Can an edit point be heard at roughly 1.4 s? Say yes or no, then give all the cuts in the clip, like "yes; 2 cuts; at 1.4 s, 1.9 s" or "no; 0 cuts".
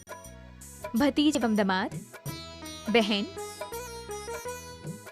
yes; 1 cut; at 1.4 s